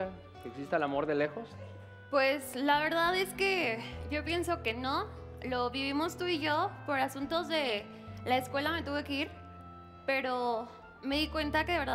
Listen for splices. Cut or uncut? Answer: uncut